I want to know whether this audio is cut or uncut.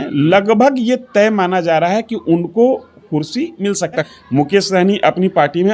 cut